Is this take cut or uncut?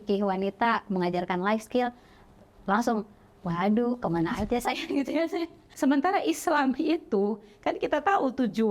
cut